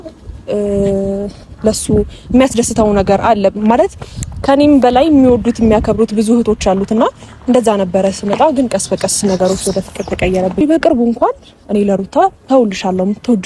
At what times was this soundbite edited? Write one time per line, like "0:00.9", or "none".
0:10.6